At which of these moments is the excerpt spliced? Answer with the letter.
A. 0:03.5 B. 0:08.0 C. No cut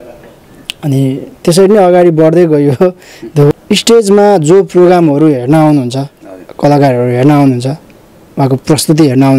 A